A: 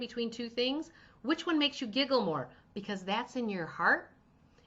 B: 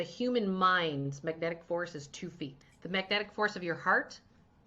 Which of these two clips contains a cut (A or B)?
B